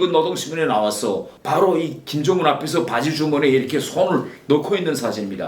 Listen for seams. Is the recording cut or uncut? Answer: cut